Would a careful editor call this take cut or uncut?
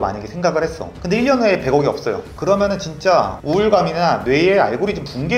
uncut